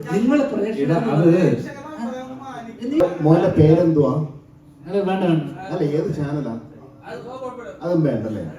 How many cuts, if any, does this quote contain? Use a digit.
1